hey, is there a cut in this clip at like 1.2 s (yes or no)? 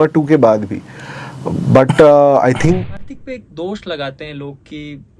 no